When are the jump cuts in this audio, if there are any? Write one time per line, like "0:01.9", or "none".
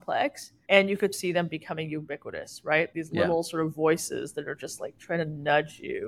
0:01.1
0:02.9